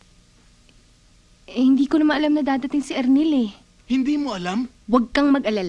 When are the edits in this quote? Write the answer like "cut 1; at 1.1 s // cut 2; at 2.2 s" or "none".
cut 1; at 4.8 s